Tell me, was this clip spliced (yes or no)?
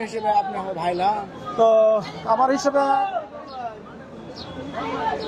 no